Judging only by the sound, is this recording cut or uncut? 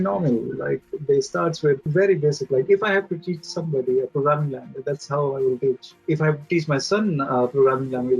cut